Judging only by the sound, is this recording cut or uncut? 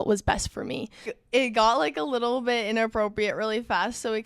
cut